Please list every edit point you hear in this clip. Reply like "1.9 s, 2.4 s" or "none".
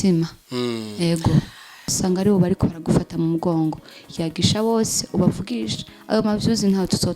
1.9 s